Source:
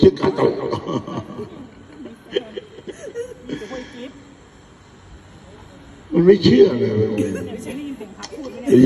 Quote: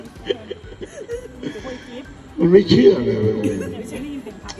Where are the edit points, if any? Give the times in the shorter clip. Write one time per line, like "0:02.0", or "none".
0:02.2